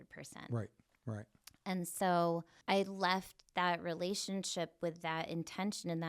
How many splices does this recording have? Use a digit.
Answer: 1